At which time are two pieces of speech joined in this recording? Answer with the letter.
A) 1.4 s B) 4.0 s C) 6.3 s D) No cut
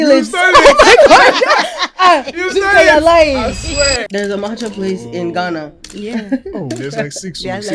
B